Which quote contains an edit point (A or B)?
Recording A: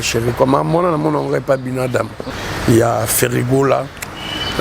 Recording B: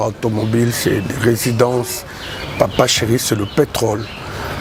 A